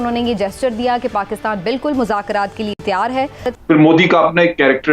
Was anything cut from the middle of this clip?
yes; 1 cut; at 3.5 s

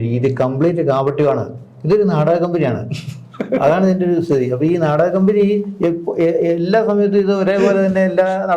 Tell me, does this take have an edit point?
no; 0 cuts

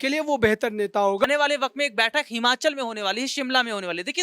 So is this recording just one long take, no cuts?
no; 1 cut; at 1.2 s

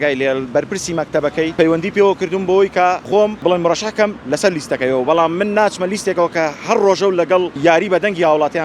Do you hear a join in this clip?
yes; 3 cuts; at 1.5 s, 3.4 s, 7.5 s

